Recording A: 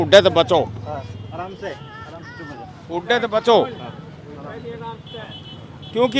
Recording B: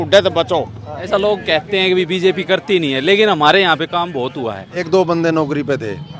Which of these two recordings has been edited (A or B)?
B